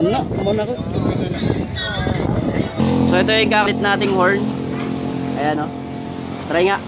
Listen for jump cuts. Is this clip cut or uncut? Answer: cut